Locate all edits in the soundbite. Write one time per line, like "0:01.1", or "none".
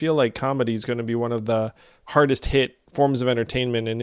0:02.8